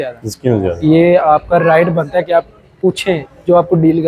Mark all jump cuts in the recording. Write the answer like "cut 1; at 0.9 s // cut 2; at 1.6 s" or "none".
none